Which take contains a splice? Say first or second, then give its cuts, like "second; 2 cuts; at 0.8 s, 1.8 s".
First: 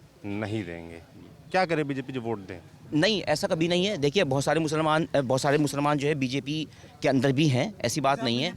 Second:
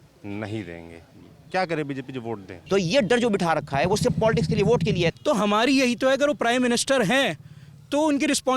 second; 2 cuts; at 2.5 s, 5.1 s